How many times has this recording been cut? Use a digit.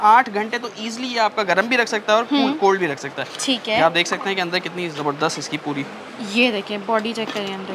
0